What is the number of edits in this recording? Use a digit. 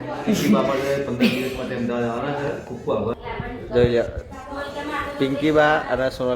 1